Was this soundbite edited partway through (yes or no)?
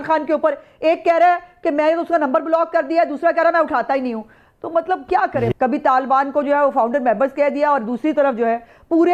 no